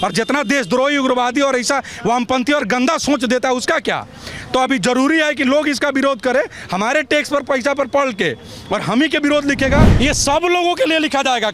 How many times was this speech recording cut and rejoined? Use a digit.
1